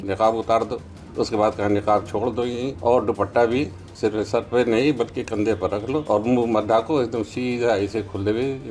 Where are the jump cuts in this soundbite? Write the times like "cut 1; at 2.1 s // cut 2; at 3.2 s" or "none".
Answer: cut 1; at 1.0 s // cut 2; at 2.7 s // cut 3; at 3.8 s // cut 4; at 6.0 s